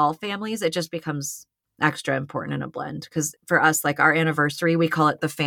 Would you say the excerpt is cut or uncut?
cut